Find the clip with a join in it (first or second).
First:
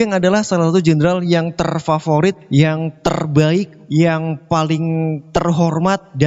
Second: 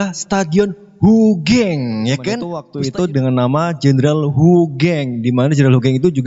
second